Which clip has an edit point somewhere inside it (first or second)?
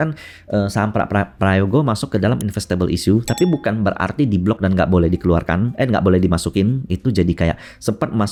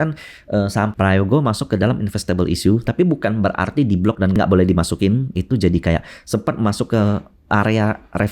second